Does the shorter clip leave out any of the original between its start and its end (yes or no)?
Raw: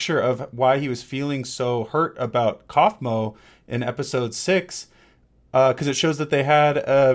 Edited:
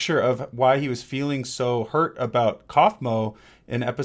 no